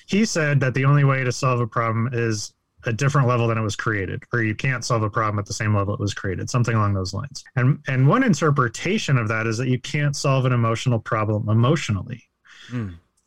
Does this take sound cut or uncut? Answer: uncut